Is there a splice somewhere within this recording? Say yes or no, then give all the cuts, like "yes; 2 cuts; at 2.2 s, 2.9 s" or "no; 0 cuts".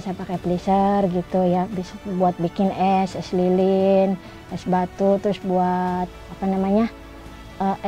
no; 0 cuts